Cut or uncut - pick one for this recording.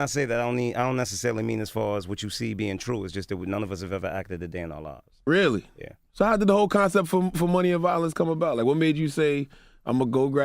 cut